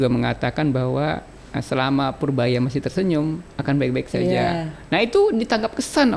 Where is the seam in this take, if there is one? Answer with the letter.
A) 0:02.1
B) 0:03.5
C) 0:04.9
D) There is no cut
D